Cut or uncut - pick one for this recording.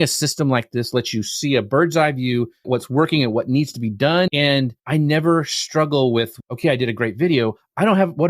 cut